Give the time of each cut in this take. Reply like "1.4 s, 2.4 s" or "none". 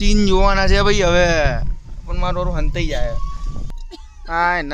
3.6 s